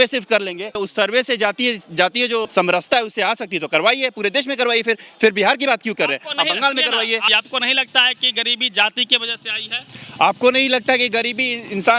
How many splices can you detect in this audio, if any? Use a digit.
3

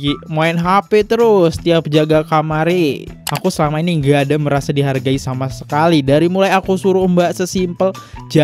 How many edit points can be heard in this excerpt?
1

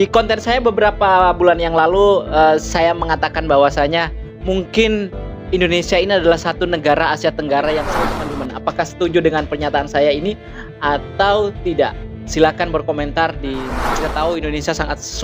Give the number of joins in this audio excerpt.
2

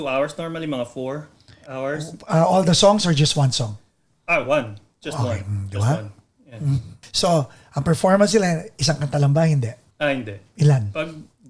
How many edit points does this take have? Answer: 2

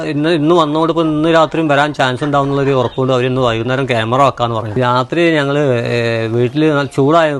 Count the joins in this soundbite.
1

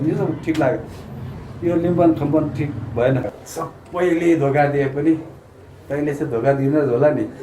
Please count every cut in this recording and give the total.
1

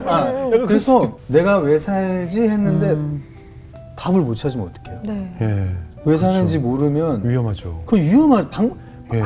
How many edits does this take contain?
1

